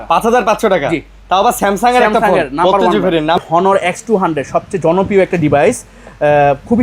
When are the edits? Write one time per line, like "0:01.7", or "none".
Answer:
0:03.4